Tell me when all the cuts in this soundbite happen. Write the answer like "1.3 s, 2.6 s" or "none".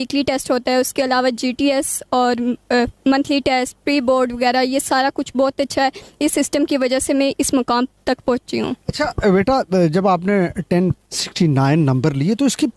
none

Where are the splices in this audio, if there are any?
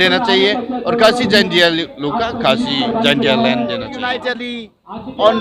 3.9 s

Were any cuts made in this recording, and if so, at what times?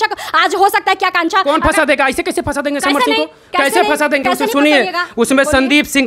none

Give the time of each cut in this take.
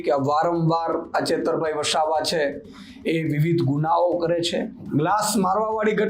4.8 s

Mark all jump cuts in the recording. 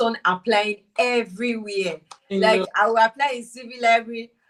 none

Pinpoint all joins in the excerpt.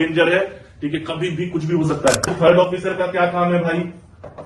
2.3 s

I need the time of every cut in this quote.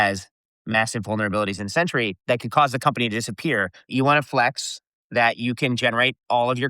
2.2 s, 3.9 s

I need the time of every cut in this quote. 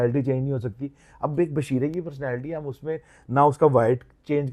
none

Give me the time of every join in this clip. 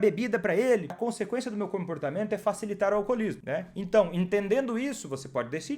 0.9 s, 3.4 s

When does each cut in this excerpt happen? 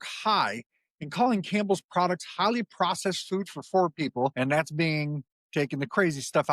4.3 s

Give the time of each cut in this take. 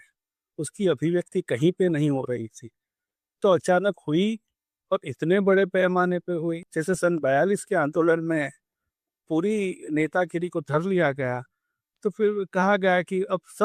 6.7 s

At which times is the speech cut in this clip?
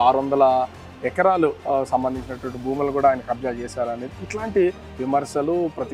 none

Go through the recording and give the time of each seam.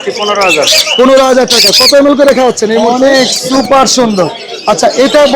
2.9 s

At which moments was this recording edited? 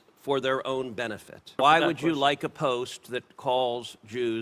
1.6 s

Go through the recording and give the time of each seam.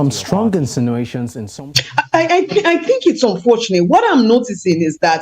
1.4 s

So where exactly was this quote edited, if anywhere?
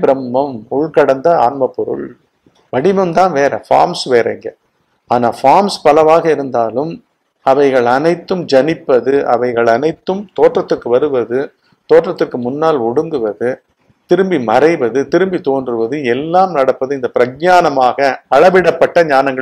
none

